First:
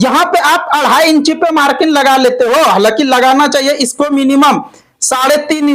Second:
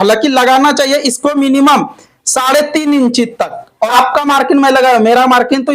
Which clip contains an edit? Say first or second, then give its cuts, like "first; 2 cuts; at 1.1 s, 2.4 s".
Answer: second; 1 cut; at 3.9 s